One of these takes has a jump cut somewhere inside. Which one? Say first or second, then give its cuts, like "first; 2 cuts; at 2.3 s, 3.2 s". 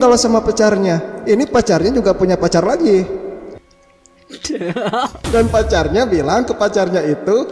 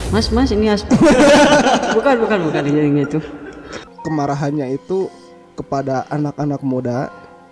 second; 1 cut; at 3.8 s